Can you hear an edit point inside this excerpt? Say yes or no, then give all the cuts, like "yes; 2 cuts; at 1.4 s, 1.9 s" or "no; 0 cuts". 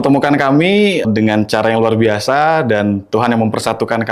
yes; 1 cut; at 1.0 s